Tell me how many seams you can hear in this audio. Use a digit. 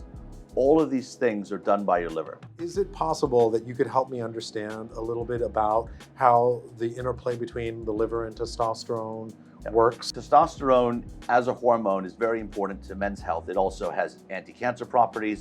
2